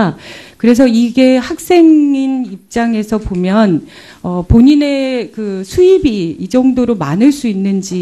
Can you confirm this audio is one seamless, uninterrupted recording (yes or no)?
yes